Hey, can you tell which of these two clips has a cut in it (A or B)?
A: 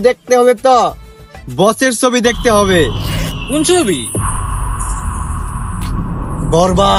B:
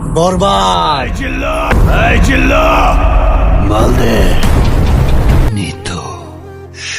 B